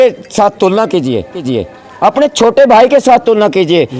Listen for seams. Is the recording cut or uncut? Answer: uncut